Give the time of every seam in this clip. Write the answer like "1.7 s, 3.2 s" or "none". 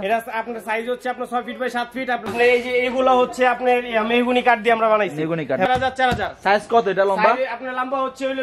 2.3 s, 5.7 s